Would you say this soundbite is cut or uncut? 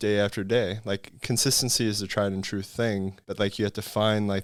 uncut